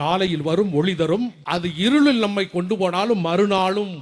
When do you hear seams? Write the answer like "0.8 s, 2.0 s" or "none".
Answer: 1.4 s